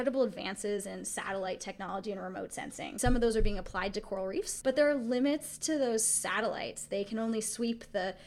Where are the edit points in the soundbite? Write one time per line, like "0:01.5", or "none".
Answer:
0:02.9
0:04.5